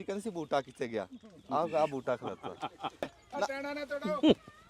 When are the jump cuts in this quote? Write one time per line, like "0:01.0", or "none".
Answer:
0:03.1